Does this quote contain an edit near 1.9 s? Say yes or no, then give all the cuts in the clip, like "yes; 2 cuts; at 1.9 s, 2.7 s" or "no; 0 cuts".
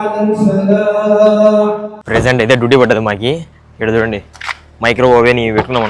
yes; 1 cut; at 1.9 s